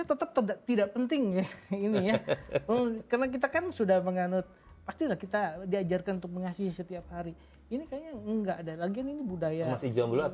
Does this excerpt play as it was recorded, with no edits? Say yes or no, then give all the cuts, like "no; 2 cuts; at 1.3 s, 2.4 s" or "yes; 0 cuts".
yes; 0 cuts